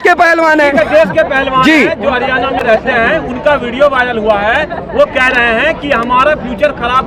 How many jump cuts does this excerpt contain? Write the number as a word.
zero